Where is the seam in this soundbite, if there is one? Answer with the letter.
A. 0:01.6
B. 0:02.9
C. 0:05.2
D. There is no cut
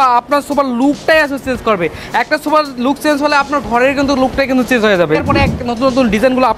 C